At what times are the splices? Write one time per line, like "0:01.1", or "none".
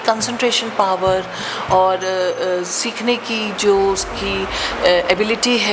none